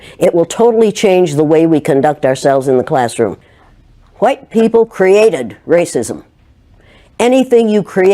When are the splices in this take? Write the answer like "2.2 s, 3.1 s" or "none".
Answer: 3.5 s

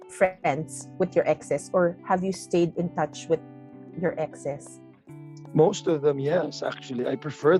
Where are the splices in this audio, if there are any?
none

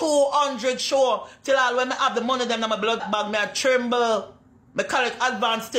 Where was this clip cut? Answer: 3.0 s

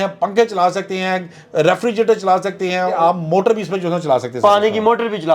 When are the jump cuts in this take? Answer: 3.0 s

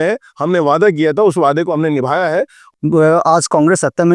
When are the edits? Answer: 2.6 s

